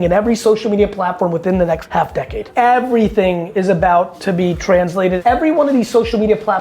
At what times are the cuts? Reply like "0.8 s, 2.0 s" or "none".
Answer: 2.2 s, 5.2 s